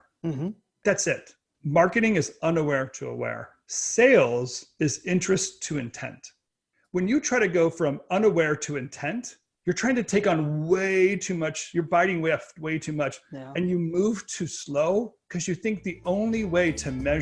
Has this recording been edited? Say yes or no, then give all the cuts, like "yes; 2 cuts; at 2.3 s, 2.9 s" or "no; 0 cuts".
no; 0 cuts